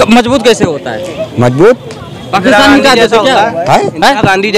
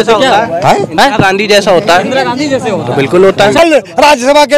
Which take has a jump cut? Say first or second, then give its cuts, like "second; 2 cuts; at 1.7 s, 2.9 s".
second; 1 cut; at 3.6 s